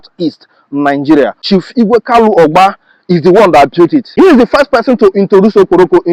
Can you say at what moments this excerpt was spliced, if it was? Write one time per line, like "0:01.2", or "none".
none